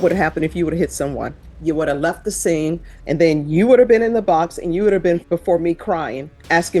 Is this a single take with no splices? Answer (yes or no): no